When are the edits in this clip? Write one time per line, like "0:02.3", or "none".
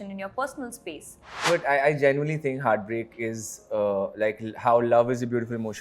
0:01.4